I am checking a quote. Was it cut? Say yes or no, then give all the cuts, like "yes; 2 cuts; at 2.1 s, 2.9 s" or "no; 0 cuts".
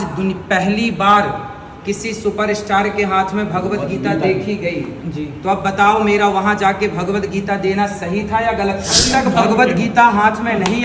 yes; 1 cut; at 9.0 s